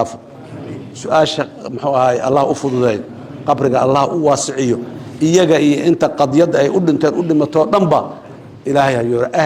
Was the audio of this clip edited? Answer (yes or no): no